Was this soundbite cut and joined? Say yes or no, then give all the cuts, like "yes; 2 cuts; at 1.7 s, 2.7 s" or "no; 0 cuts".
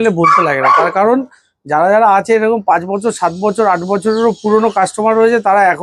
no; 0 cuts